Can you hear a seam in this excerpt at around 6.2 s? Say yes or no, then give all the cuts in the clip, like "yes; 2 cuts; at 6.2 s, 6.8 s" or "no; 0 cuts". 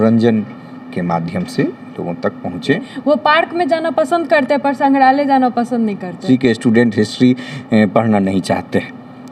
yes; 2 cuts; at 2.8 s, 6.2 s